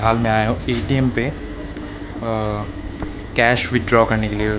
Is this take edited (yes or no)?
no